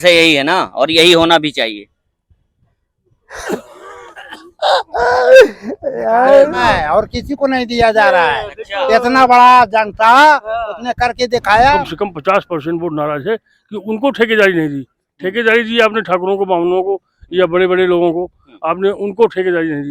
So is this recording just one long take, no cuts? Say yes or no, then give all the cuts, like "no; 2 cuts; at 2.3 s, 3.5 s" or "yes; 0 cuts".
no; 2 cuts; at 6.7 s, 11.8 s